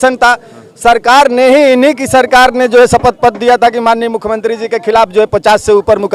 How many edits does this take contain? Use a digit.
0